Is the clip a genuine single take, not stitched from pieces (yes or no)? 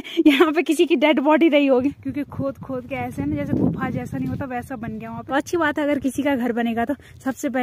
no